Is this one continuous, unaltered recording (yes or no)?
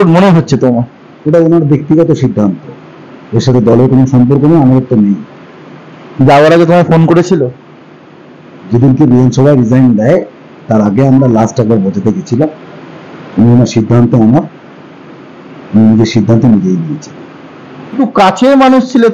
no